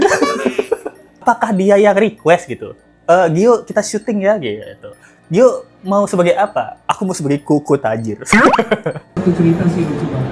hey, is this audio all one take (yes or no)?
no